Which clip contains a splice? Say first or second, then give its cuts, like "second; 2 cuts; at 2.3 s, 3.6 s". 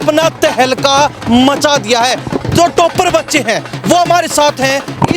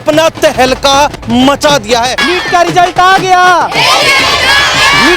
second; 1 cut; at 2.2 s